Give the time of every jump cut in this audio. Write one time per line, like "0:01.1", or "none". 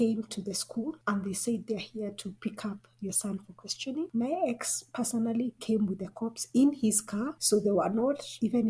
0:04.1
0:07.3